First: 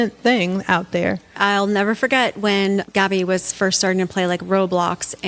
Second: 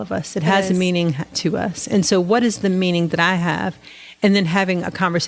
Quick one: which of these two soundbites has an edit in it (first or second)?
first